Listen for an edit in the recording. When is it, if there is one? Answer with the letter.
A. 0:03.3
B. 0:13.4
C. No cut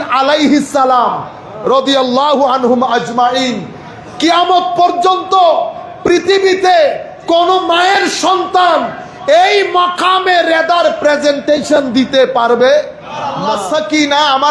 B